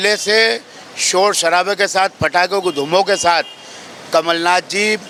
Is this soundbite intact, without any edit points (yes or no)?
yes